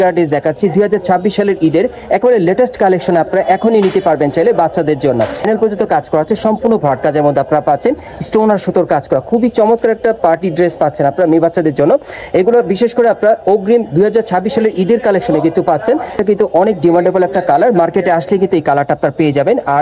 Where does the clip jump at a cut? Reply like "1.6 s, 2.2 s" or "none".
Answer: 5.4 s, 16.2 s